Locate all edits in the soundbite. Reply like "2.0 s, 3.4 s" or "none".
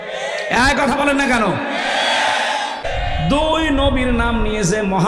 2.8 s